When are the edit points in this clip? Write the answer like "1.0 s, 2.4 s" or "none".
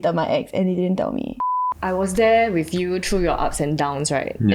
1.4 s